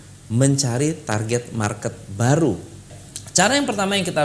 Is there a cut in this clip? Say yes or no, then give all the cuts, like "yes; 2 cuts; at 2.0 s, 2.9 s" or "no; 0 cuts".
yes; 1 cut; at 3.2 s